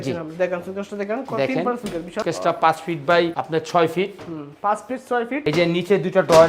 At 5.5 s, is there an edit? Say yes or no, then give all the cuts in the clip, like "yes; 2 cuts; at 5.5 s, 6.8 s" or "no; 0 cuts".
yes; 1 cut; at 5.5 s